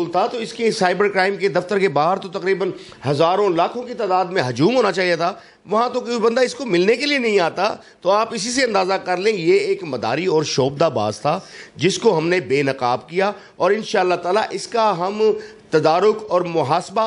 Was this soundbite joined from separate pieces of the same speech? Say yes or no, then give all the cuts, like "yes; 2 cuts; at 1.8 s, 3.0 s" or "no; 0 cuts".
no; 0 cuts